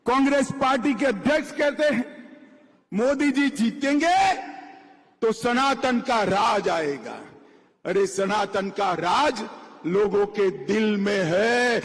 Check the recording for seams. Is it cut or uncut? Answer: uncut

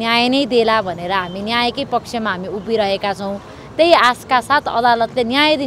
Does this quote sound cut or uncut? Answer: uncut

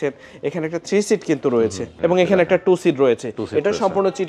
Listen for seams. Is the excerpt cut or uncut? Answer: cut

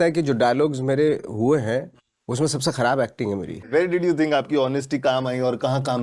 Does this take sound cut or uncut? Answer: cut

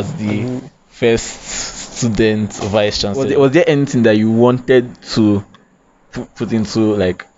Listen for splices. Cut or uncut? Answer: cut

